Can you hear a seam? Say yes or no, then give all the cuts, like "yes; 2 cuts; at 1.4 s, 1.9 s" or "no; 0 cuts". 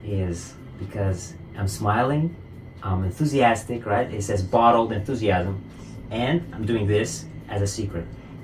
no; 0 cuts